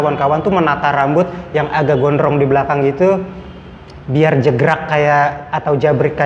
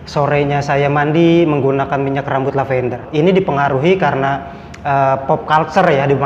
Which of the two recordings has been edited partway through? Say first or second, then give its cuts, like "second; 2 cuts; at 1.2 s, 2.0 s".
second; 1 cut; at 3.1 s